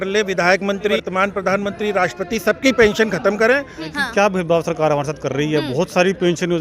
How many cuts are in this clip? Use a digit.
2